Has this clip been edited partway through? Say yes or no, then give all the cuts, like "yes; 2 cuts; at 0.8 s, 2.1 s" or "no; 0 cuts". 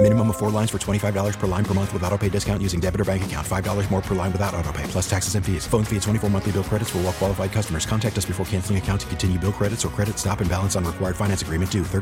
no; 0 cuts